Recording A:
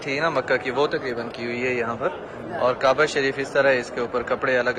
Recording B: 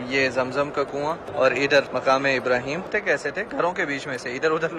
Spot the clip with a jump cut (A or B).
B